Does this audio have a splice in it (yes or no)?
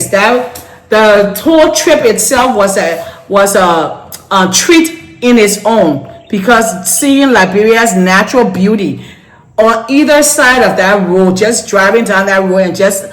no